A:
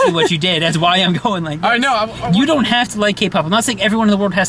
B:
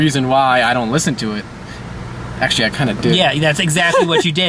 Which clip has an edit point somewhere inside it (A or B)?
A